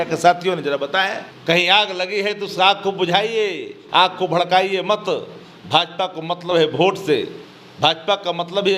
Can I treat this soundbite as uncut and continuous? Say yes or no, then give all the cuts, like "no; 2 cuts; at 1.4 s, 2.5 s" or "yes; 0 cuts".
no; 1 cut; at 1.3 s